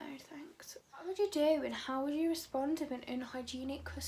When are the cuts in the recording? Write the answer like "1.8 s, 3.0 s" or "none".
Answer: 1.0 s